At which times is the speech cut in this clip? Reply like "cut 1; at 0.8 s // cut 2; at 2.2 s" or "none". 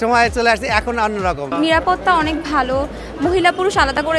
cut 1; at 1.5 s